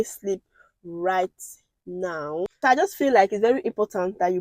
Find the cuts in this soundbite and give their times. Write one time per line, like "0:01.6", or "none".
0:02.5

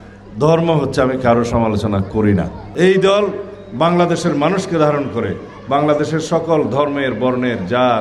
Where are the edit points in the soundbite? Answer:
0:02.6

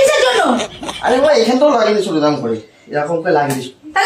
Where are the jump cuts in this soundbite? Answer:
none

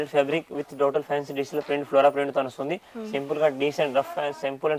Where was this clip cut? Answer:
none

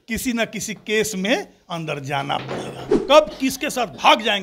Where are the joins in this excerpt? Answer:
0:02.9

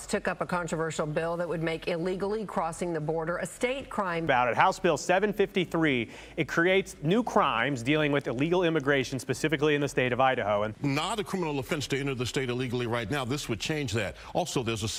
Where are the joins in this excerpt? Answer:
none

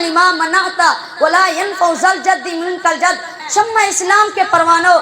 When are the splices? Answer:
0:03.3

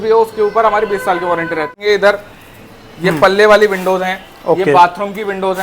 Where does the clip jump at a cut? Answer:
0:01.7

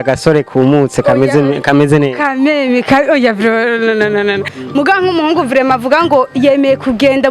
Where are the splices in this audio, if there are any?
0:04.5

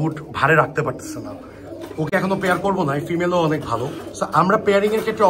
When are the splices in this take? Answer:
none

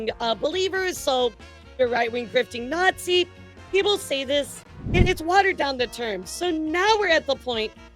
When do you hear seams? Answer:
0:04.7

